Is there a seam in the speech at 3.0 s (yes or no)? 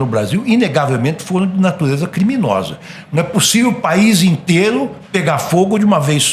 no